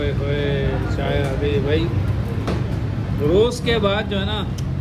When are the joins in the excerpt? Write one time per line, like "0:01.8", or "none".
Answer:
none